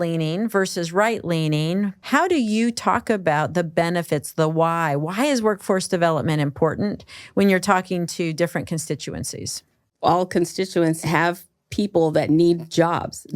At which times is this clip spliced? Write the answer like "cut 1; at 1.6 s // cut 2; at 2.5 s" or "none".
cut 1; at 2.0 s // cut 2; at 9.9 s // cut 3; at 11.0 s